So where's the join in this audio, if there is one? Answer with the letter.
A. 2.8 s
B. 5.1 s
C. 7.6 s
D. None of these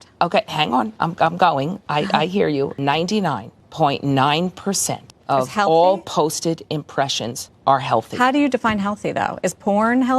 A